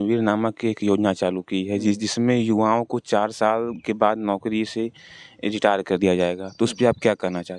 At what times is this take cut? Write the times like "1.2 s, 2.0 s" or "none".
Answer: none